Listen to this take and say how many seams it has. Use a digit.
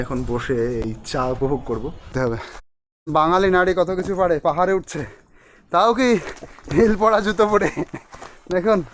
1